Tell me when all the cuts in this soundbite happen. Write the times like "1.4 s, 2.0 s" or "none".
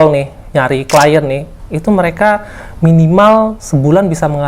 none